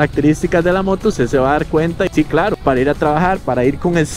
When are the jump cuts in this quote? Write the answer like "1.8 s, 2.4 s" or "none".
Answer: 2.1 s